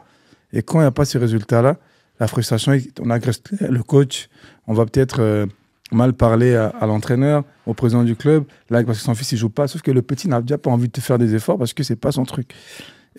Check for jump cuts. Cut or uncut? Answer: uncut